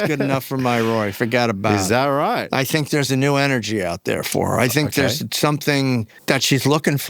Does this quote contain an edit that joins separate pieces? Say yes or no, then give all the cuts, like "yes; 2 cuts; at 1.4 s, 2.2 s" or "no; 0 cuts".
yes; 2 cuts; at 2.4 s, 6.1 s